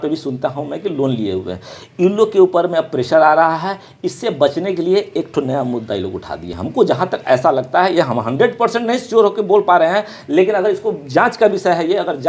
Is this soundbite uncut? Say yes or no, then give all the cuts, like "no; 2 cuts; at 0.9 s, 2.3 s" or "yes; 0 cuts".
yes; 0 cuts